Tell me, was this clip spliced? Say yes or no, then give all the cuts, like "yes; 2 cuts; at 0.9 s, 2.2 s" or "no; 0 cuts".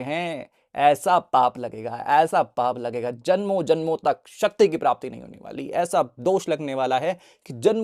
no; 0 cuts